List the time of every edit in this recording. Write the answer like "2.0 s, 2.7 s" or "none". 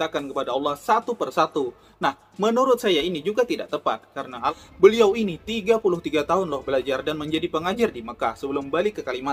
4.5 s